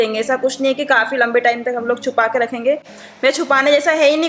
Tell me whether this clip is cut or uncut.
uncut